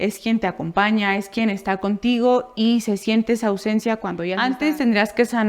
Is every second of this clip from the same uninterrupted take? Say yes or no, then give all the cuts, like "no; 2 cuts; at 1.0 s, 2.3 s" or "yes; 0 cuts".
no; 1 cut; at 4.3 s